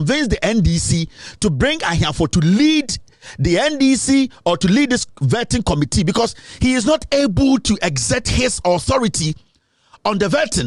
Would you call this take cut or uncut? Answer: uncut